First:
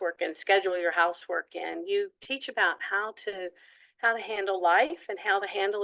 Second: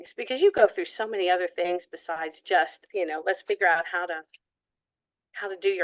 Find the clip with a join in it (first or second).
second